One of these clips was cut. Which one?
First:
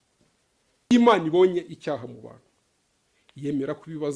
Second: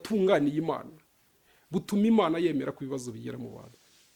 first; 1 cut; at 0.9 s

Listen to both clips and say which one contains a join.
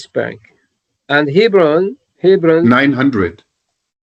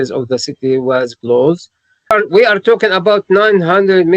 second; 1 cut; at 2.1 s

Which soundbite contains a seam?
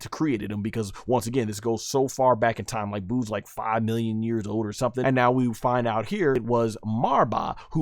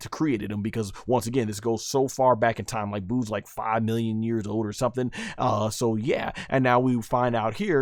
first; 2 cuts; at 5.0 s, 6.4 s

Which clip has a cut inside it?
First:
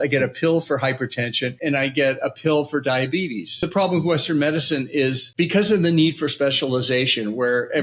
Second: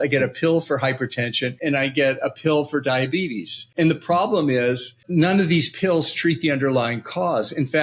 first; 1 cut; at 3.7 s

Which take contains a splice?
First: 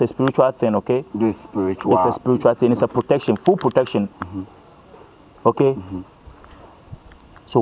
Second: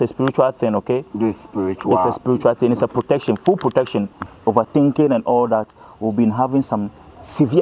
second; 1 cut; at 4.3 s

